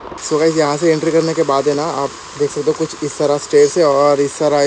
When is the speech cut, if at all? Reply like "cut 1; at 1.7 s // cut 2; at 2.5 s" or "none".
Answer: none